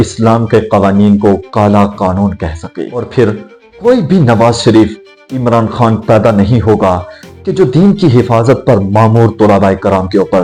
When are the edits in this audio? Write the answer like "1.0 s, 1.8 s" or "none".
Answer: none

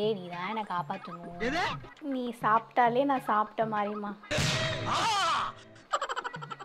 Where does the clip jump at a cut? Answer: 1.9 s

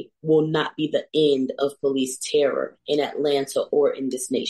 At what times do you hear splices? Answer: none

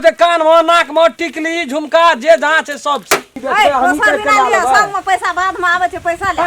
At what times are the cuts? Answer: 3.3 s

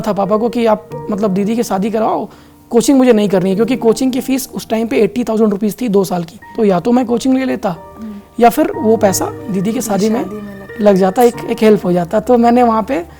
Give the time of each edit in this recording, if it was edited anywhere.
6.5 s

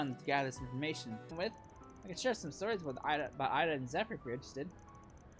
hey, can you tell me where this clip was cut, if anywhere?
1.3 s

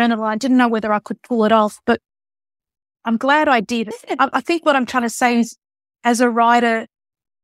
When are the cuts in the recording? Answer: 4.0 s

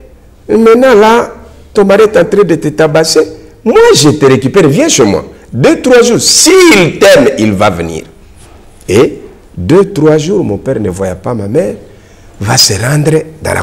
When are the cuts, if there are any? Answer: none

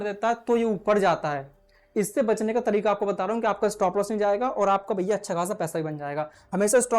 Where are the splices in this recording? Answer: none

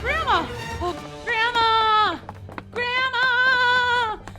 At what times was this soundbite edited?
1.0 s

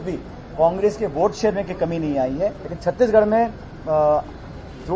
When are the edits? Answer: 2.7 s

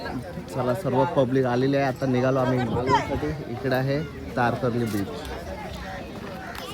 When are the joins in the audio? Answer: none

